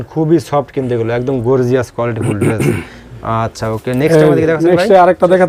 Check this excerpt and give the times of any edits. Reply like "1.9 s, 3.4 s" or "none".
none